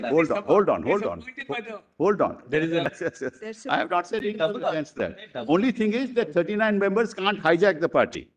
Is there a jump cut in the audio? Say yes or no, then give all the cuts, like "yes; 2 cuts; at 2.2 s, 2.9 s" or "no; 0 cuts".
yes; 1 cut; at 2.8 s